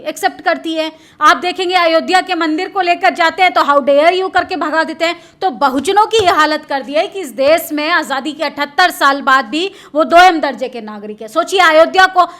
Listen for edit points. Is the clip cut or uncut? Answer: uncut